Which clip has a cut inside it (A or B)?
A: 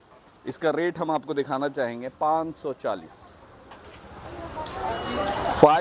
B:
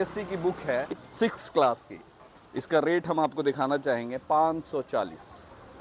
B